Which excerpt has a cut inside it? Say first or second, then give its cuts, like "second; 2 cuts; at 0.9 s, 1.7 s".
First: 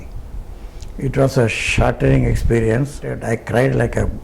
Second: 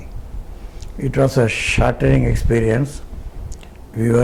first; 1 cut; at 3.2 s